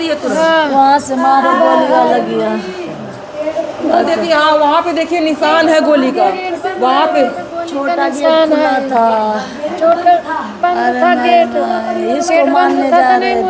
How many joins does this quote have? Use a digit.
0